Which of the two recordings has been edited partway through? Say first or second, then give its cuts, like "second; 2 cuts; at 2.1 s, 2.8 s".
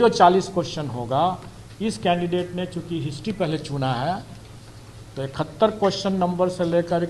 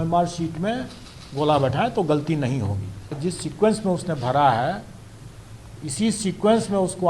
second; 1 cut; at 3.2 s